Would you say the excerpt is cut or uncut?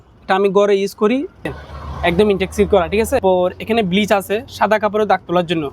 cut